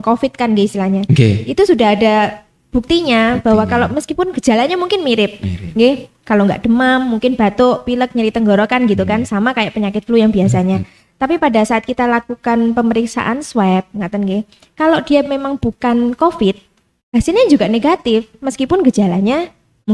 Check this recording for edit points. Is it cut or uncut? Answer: uncut